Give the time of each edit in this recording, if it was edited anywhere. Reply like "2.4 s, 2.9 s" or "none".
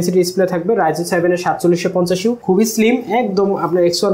2.4 s